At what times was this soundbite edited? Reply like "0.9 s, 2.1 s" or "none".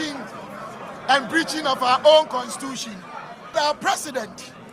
3.6 s